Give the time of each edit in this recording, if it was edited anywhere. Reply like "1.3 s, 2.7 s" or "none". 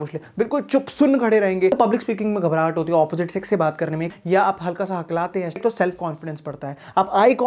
1.7 s, 4.1 s, 5.6 s